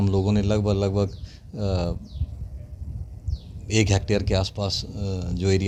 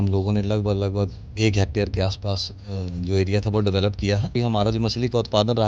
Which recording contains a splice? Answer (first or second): second